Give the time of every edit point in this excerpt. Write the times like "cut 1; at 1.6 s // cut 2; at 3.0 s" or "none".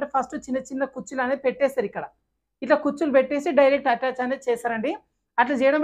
none